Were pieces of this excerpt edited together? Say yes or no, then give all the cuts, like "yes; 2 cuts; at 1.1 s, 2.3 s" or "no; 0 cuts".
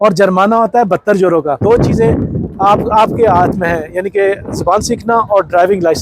yes; 1 cut; at 1.6 s